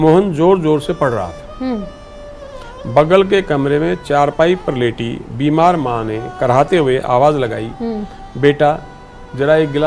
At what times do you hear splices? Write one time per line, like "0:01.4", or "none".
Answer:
none